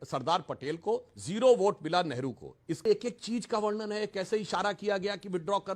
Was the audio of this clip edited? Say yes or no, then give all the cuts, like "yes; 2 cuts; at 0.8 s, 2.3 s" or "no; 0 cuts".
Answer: yes; 1 cut; at 2.9 s